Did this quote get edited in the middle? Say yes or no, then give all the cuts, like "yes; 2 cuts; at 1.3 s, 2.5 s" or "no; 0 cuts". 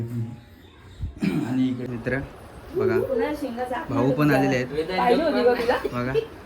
yes; 1 cut; at 1.8 s